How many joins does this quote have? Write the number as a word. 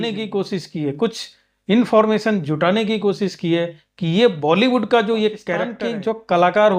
one